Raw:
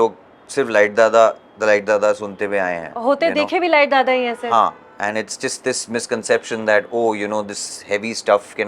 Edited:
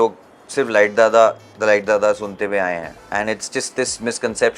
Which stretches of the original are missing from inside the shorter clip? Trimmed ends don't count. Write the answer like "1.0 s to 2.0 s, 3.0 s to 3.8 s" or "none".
2.9 s to 4.8 s